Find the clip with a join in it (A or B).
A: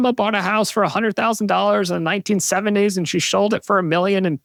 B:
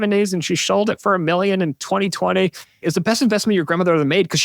B